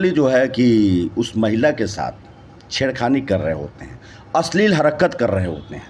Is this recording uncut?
yes; 0 cuts

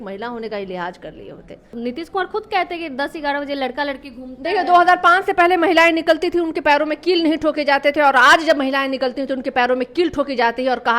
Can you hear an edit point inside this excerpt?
yes; 1 cut; at 1.7 s

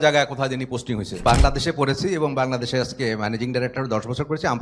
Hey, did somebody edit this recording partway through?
yes; 1 cut; at 1.2 s

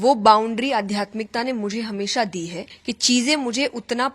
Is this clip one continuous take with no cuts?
no; 1 cut; at 2.7 s

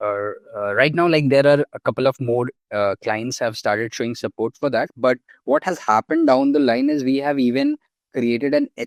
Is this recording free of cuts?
yes; 0 cuts

